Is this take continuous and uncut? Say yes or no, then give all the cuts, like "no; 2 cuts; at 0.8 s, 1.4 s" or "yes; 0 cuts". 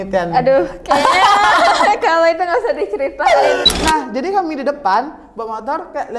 no; 1 cut; at 3.7 s